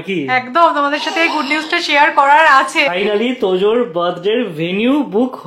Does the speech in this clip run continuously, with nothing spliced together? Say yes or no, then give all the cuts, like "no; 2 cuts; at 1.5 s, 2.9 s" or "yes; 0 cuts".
no; 1 cut; at 2.9 s